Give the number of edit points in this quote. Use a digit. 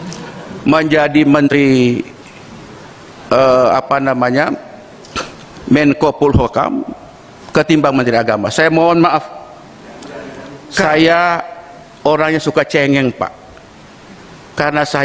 1